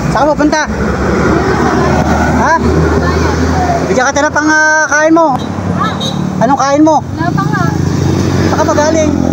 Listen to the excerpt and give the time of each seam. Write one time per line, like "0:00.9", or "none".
none